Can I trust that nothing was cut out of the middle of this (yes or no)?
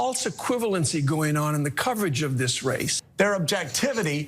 no